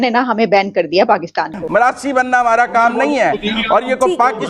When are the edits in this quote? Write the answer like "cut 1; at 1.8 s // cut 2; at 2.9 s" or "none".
cut 1; at 1.6 s